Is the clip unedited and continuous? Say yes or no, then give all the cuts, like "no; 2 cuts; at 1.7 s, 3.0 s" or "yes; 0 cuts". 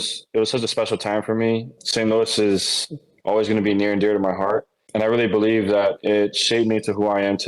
no; 2 cuts; at 1.7 s, 4.8 s